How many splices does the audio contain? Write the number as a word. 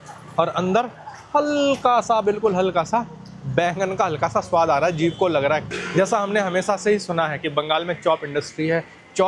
one